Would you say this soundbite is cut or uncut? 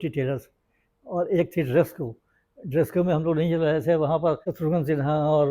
cut